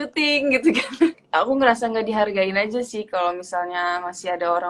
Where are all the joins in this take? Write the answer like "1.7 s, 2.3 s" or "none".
1.2 s